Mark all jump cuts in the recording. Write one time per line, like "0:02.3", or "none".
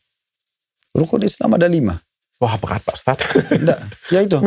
none